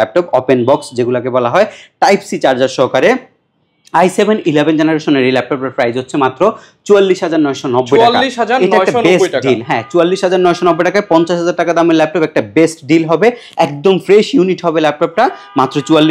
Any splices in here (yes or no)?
no